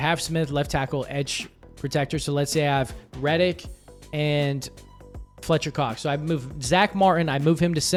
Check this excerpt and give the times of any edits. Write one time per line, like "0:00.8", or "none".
none